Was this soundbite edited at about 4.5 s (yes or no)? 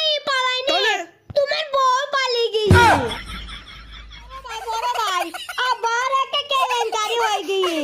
yes